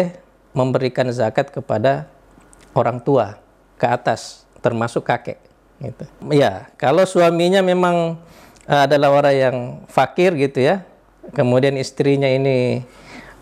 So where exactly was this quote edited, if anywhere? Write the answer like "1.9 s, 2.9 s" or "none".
6.2 s

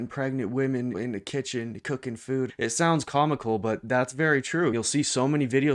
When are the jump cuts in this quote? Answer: 1.0 s, 2.5 s, 4.7 s

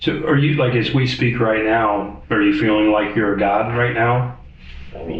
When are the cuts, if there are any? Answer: 2.2 s

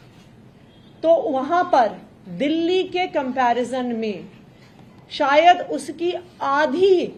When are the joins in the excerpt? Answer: none

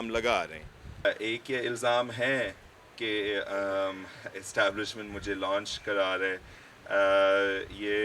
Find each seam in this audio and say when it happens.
1.0 s

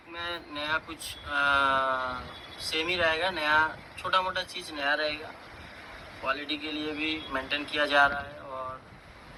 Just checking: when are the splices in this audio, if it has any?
none

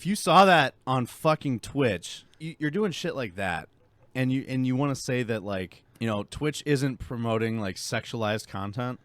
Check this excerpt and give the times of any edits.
2.4 s, 5.8 s

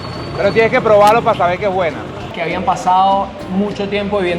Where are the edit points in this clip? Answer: 2.3 s

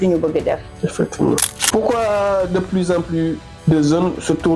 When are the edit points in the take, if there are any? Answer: 1.4 s, 3.5 s

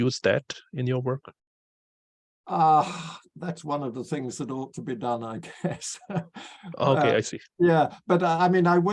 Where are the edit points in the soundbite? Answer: none

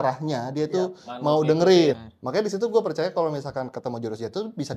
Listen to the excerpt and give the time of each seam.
2.0 s

